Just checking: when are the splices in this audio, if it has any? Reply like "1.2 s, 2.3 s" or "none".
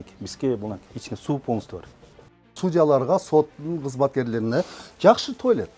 2.4 s